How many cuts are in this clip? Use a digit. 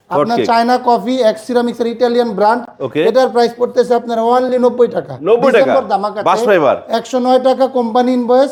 0